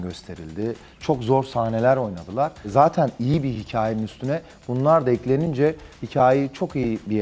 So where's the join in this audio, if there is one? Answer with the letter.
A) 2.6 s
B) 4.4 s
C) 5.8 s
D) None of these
A